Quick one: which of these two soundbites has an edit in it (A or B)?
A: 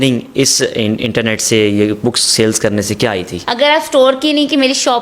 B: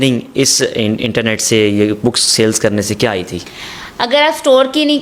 A